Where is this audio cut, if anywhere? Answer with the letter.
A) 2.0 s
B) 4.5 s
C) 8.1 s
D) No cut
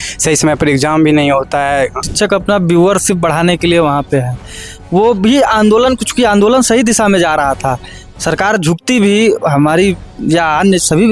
A